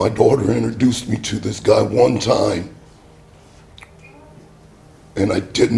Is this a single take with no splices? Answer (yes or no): yes